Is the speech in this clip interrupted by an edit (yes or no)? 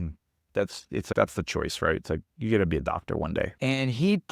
yes